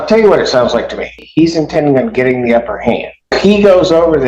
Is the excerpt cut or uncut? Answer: cut